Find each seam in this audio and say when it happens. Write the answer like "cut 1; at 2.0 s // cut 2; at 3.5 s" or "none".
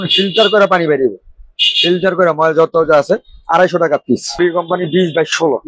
cut 1; at 4.4 s